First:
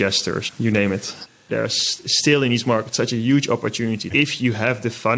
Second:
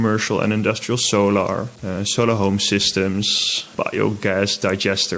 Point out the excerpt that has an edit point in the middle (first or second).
first